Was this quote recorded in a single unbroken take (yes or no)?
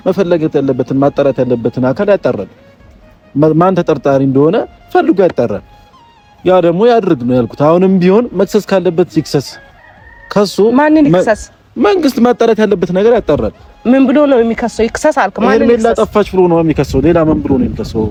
yes